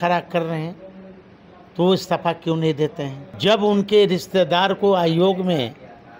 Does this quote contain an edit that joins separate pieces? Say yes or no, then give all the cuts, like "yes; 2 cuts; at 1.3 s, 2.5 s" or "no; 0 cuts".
yes; 1 cut; at 3.2 s